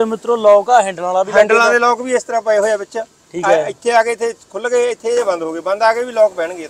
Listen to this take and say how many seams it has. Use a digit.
0